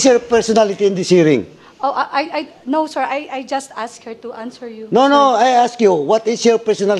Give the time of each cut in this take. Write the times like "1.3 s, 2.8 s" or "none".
none